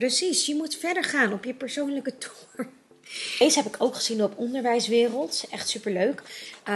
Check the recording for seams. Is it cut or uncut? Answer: cut